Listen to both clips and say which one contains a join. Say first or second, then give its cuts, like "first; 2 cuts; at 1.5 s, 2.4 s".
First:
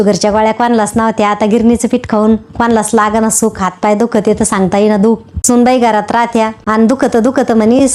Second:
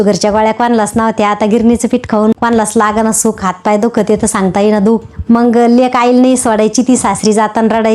second; 2 cuts; at 2.4 s, 5.1 s